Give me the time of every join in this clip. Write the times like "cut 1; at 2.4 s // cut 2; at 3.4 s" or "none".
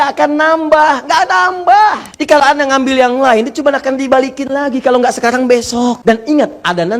cut 1; at 2.1 s // cut 2; at 6.0 s